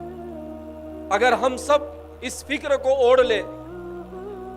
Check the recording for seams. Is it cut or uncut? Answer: cut